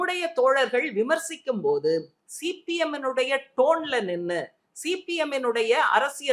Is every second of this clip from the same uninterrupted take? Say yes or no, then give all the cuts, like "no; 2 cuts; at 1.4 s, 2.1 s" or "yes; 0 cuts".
yes; 0 cuts